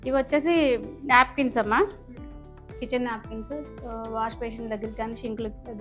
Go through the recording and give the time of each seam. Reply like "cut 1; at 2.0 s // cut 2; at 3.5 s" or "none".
none

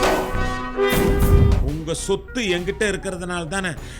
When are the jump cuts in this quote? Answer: cut 1; at 1.4 s

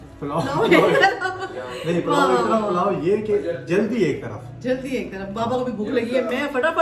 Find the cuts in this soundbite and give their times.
none

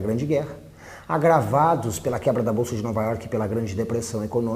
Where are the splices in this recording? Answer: cut 1; at 1.9 s

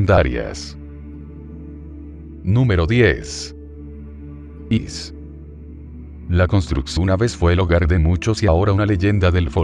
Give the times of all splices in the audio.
none

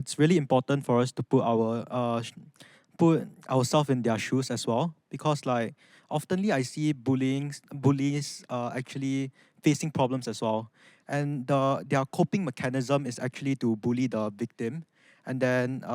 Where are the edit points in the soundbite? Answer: none

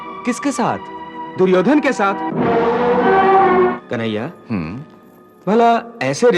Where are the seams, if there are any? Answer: cut 1; at 3.7 s

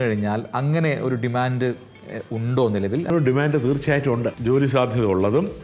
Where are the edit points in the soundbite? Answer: cut 1; at 3.1 s // cut 2; at 4.4 s

